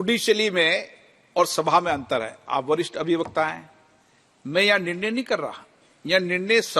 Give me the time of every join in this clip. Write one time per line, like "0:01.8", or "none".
none